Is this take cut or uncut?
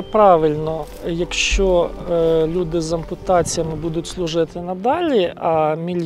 cut